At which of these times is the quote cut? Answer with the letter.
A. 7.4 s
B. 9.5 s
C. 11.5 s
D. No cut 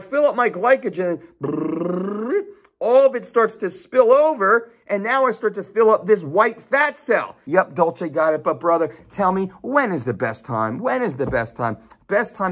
A